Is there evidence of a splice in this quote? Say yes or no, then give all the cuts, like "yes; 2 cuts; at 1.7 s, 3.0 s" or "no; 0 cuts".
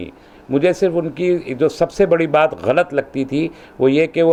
no; 0 cuts